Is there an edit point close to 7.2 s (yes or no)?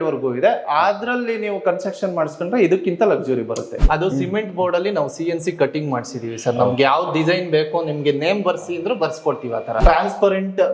no